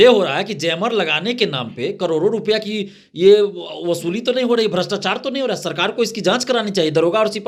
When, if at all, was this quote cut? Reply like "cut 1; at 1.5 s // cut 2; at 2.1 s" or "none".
none

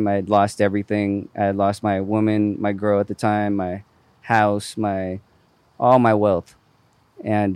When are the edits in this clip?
none

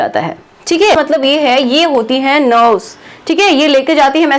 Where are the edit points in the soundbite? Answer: cut 1; at 1.0 s

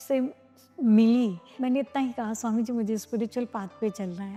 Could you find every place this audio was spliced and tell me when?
none

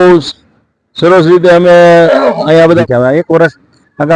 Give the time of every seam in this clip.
cut 1; at 2.8 s

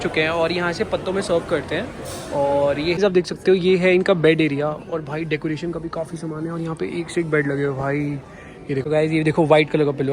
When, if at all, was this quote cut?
cut 1; at 3.0 s // cut 2; at 8.8 s

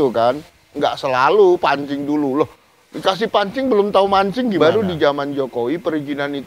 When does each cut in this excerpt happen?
cut 1; at 4.6 s

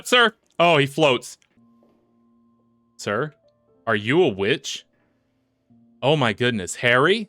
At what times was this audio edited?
cut 1; at 1.4 s

